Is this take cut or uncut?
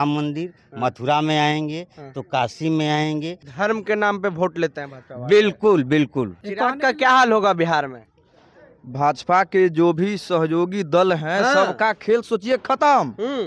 cut